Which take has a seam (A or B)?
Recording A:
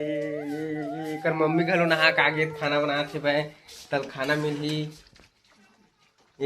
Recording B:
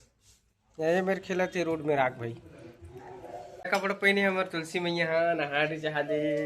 B